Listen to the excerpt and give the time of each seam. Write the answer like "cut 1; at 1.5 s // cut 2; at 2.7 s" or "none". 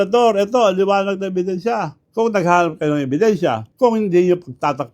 cut 1; at 2.0 s // cut 2; at 3.7 s